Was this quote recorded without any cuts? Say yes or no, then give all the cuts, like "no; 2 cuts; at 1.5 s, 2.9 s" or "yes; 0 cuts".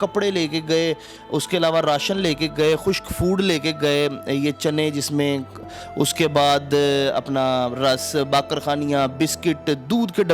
yes; 0 cuts